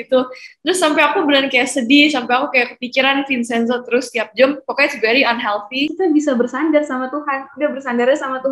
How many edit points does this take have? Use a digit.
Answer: 1